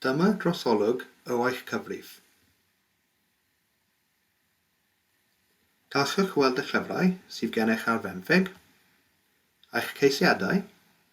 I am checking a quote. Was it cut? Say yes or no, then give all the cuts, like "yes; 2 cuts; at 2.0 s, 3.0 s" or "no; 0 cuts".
yes; 1 cut; at 5.1 s